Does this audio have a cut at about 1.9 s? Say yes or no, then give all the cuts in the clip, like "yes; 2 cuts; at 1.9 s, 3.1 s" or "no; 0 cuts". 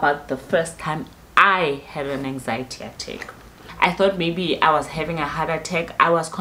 no; 1 cut; at 3.6 s